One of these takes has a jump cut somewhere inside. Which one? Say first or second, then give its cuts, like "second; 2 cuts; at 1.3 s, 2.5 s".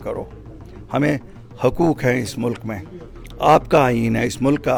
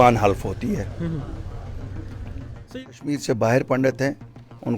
second; 1 cut; at 2.6 s